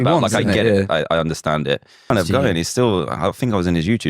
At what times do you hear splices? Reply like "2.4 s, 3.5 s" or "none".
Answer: 2.0 s